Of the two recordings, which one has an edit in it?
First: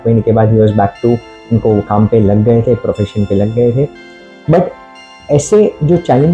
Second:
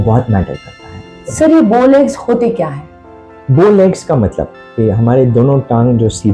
second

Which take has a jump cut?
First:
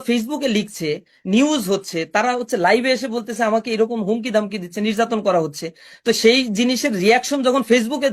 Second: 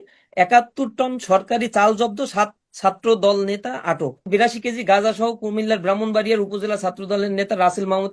second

